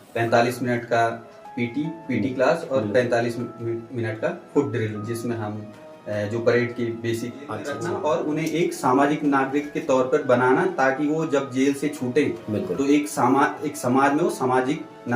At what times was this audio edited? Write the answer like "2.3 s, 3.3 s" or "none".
7.9 s